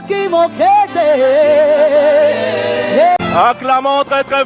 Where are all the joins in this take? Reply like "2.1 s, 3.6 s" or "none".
3.2 s